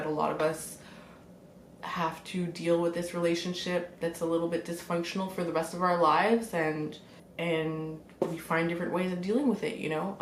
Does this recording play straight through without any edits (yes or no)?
yes